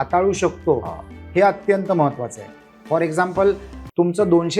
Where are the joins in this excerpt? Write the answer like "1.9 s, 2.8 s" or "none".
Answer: none